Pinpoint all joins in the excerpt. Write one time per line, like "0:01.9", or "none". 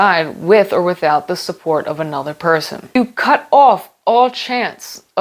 0:03.0

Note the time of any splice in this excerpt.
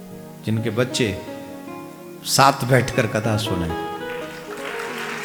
none

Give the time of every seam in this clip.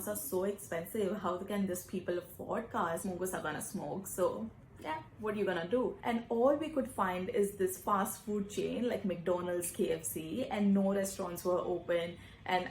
0:03.0
0:06.0

